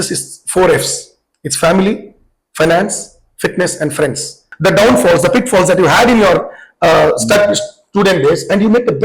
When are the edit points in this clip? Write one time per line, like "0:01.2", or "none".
0:04.4